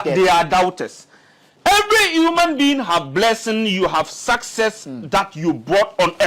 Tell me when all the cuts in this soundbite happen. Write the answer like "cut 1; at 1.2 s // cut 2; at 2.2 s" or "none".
cut 1; at 1.5 s